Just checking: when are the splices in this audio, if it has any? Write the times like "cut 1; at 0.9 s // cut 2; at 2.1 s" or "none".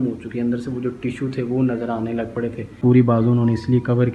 cut 1; at 2.8 s

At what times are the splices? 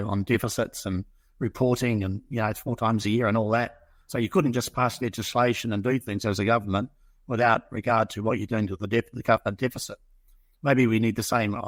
none

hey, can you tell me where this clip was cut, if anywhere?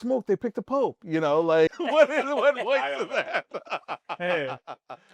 cut 1; at 1.8 s

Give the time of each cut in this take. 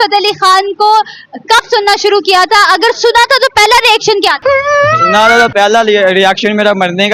none

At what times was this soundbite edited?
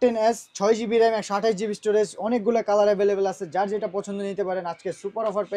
none

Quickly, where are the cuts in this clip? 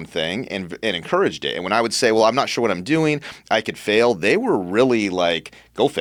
none

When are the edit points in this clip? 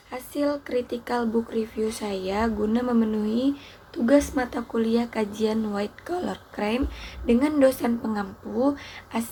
none

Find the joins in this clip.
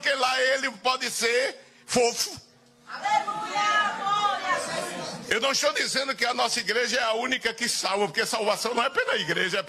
none

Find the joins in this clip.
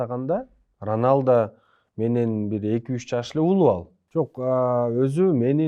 cut 1; at 3.9 s

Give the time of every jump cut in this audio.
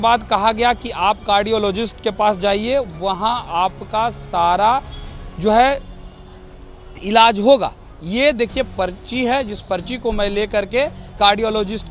none

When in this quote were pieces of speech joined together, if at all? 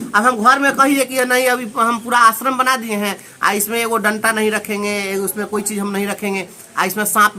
none

